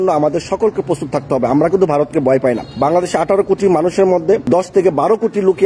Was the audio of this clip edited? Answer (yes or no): yes